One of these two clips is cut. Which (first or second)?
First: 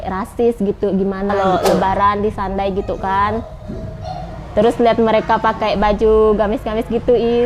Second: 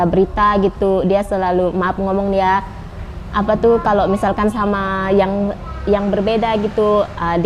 first